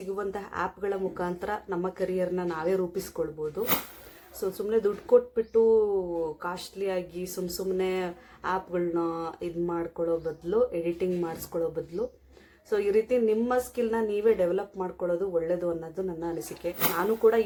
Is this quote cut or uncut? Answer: uncut